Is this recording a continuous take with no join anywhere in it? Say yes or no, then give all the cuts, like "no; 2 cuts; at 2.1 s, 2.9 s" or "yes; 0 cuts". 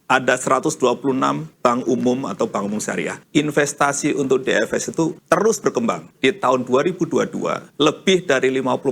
no; 2 cuts; at 3.2 s, 6.1 s